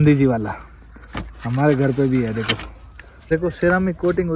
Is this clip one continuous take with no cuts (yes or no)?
no